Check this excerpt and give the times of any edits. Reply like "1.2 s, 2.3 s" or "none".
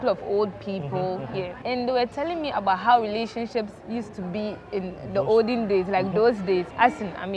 1.6 s